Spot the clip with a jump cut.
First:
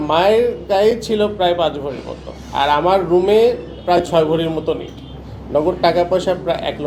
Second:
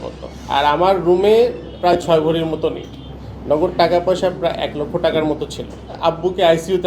second; 1 cut; at 5.8 s

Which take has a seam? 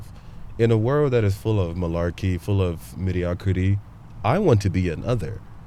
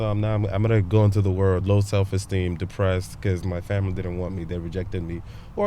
second; 1 cut; at 1.6 s

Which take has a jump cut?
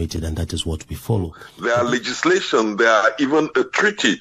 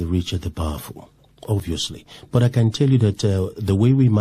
first; 1 cut; at 1.5 s

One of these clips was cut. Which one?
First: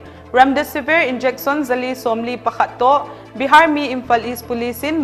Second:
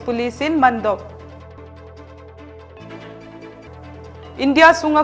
second; 2 cuts; at 1.6 s, 3.8 s

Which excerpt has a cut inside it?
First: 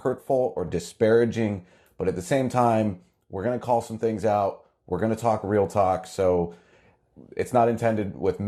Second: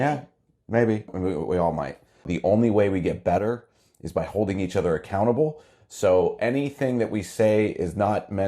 second; 1 cut; at 2.3 s

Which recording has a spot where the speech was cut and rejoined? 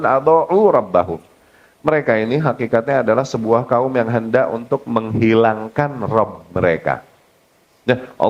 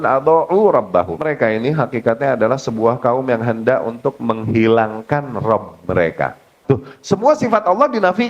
second; 2 cuts; at 1.2 s, 6.6 s

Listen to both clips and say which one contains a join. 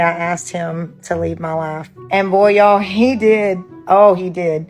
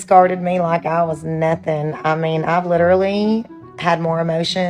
first; 2 cuts; at 1.9 s, 3.7 s

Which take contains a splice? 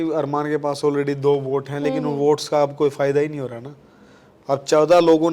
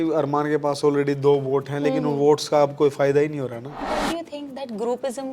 second; 1 cut; at 3.8 s

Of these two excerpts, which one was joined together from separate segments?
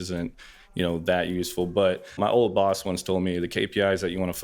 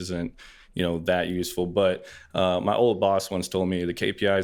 first; 1 cut; at 2.2 s

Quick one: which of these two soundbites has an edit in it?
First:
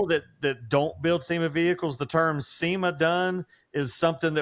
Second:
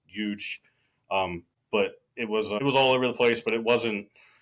second; 2 cuts; at 1.5 s, 2.5 s

